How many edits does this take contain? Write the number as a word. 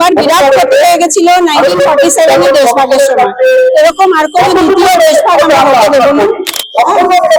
zero